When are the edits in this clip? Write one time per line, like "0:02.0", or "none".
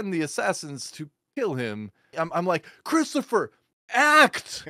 0:02.1